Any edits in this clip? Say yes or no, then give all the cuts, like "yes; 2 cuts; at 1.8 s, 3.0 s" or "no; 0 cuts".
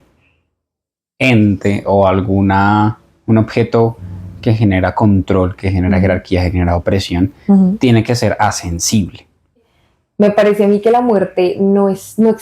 yes; 1 cut; at 9.7 s